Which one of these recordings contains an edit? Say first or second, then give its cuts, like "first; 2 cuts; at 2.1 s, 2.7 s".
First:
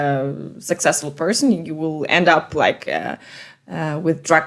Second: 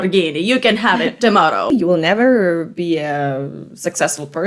second; 1 cut; at 1.7 s